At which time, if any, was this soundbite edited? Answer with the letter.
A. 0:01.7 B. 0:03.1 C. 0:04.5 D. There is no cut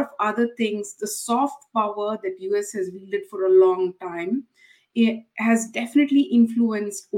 D